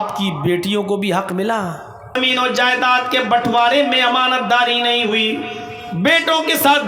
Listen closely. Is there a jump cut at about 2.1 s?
yes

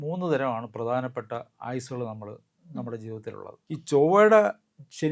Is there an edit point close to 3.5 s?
yes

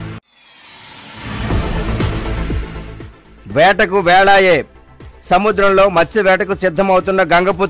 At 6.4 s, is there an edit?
no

